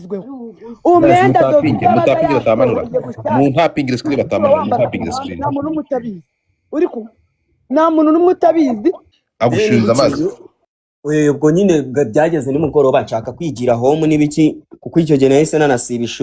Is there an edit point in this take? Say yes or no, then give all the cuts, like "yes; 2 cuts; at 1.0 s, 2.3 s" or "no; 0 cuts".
yes; 1 cut; at 9.1 s